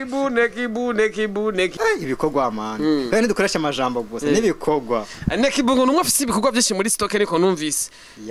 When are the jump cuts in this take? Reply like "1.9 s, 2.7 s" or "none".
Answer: 1.7 s